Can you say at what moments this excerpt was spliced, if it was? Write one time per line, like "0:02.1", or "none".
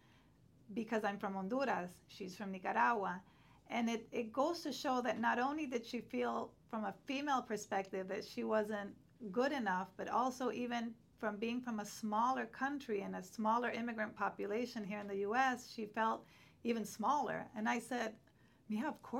none

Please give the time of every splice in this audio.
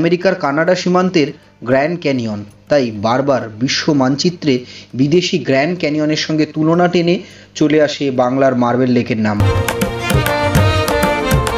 none

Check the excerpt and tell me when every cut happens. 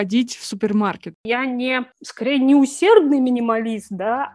0:01.2

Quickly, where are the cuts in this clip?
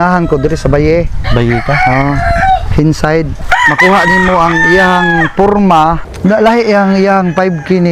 0:03.4
0:06.1

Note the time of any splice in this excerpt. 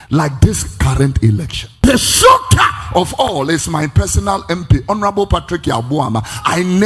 0:01.8

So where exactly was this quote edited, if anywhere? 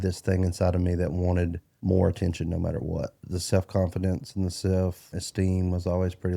0:01.7
0:03.2
0:05.1

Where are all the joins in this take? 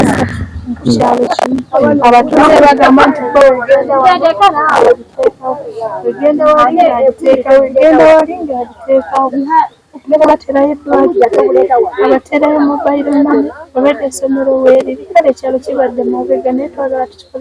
none

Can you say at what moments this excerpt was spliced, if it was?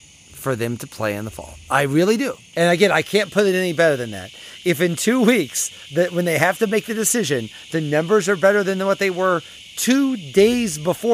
0:02.4

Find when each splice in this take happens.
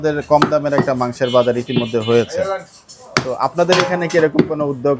none

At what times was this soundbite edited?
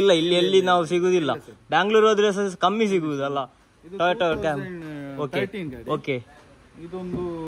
none

